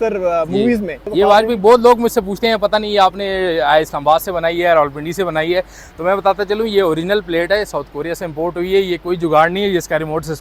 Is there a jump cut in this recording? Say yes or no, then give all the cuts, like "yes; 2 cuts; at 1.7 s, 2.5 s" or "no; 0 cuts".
no; 0 cuts